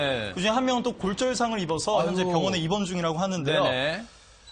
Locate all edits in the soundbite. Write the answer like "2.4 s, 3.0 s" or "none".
1.3 s

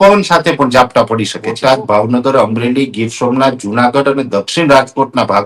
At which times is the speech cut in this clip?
1.5 s

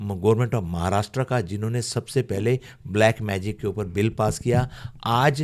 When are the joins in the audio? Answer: none

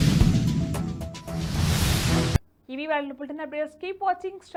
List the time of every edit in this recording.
none

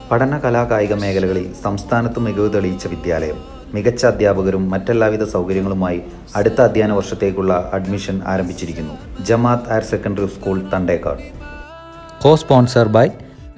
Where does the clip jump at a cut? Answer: none

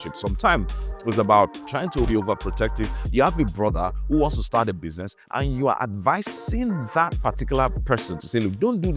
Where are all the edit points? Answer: 2.1 s

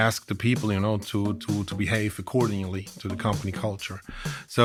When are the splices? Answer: none

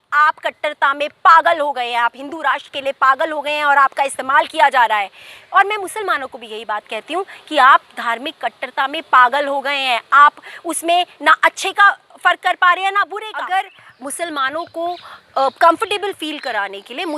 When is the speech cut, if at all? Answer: 13.2 s

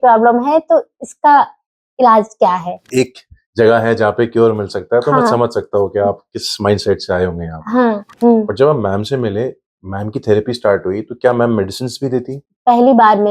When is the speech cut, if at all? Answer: 2.8 s, 8.1 s, 12.4 s

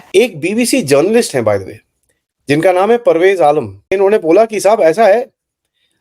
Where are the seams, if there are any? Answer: 3.9 s

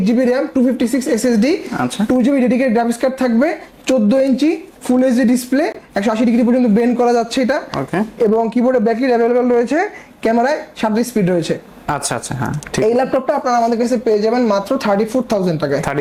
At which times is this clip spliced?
none

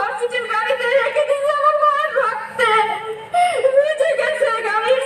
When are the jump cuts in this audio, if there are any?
none

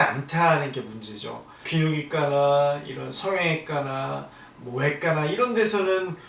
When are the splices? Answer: 1.6 s

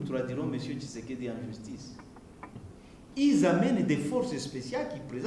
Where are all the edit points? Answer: 2.7 s

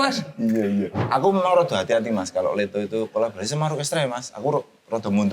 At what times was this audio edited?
1.0 s

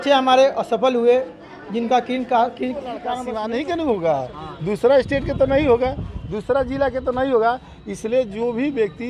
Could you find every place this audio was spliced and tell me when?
3.1 s

